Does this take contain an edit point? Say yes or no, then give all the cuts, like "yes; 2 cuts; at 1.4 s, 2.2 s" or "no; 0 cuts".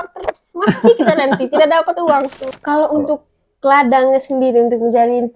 yes; 1 cut; at 2.5 s